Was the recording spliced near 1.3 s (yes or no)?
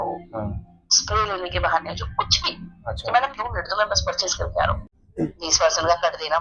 no